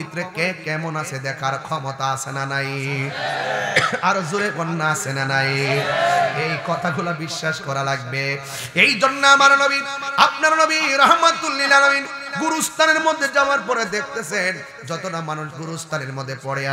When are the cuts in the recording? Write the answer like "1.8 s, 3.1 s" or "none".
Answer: none

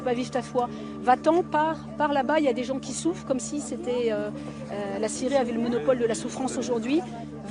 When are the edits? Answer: none

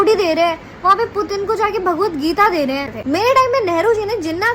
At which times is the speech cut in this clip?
2.9 s

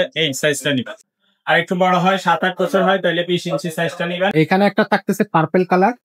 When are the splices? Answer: 1.0 s, 4.3 s

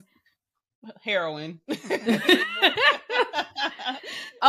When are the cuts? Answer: none

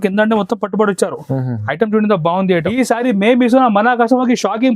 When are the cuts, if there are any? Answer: 2.7 s

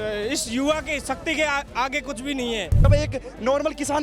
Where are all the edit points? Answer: 2.9 s

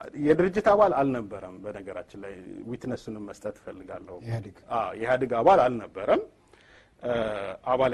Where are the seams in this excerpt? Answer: none

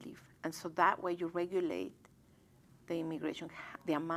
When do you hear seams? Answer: none

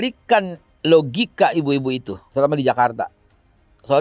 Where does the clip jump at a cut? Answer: 2.2 s

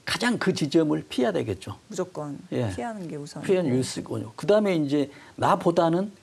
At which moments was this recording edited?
none

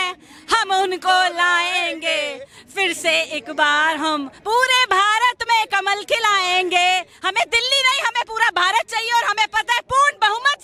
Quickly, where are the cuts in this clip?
none

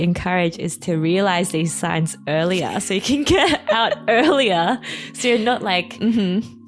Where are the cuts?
none

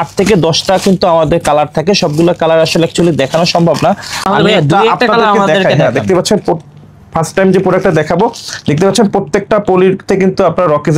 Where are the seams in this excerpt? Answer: none

